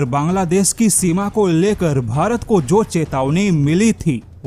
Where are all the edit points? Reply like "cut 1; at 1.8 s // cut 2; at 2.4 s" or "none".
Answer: none